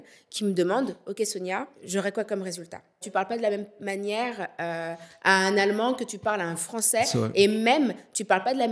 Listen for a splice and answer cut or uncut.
cut